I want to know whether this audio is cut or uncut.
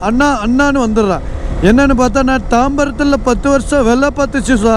uncut